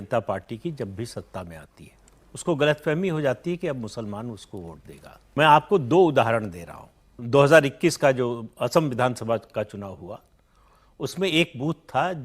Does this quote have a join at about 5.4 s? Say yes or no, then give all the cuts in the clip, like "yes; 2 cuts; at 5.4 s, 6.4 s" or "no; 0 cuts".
yes; 2 cuts; at 5.4 s, 7.1 s